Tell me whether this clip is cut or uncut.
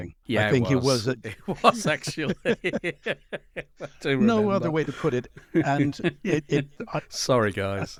uncut